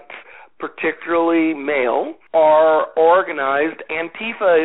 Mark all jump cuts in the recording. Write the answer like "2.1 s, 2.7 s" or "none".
2.2 s